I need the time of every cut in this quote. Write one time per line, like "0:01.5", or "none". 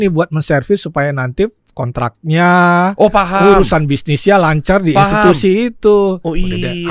none